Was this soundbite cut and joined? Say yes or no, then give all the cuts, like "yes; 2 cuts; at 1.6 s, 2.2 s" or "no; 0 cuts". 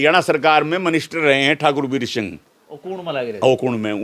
no; 0 cuts